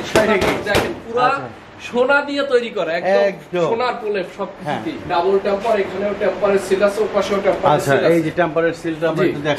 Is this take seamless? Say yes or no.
no